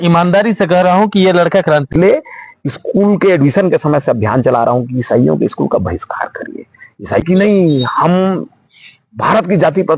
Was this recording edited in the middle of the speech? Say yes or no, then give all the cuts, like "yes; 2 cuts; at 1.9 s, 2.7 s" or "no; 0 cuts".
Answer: yes; 2 cuts; at 1.9 s, 7.2 s